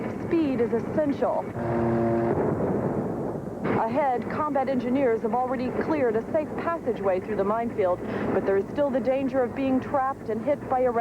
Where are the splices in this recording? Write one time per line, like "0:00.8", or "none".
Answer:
0:05.9